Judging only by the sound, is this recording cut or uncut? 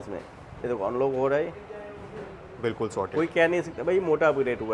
uncut